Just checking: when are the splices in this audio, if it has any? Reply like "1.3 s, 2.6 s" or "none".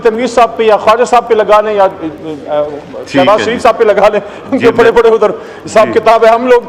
none